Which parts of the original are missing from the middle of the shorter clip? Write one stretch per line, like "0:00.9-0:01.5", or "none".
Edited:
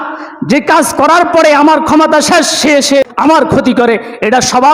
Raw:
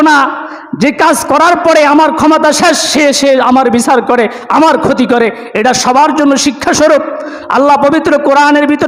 0:03.3-0:04.4